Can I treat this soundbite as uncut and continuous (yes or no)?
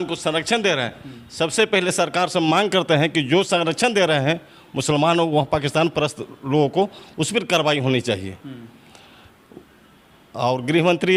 yes